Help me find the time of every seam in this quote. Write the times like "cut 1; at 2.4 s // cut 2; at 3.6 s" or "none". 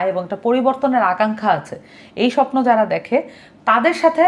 none